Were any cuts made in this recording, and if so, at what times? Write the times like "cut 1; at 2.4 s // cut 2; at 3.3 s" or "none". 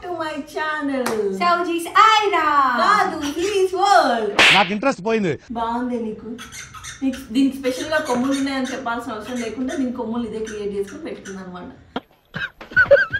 none